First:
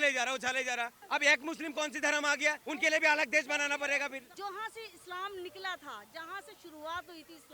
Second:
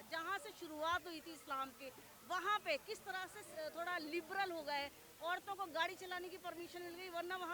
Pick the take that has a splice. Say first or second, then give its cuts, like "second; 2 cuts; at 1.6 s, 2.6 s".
first; 3 cuts; at 1.0 s, 2.6 s, 4.3 s